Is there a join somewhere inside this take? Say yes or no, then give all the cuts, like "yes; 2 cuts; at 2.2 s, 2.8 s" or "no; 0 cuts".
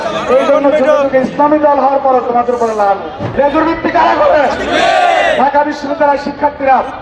yes; 1 cut; at 3.2 s